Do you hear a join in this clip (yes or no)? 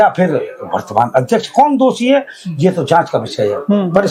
no